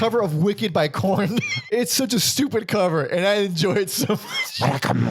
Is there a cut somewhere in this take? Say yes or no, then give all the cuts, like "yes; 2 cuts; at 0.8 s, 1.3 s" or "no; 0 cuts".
yes; 1 cut; at 1.6 s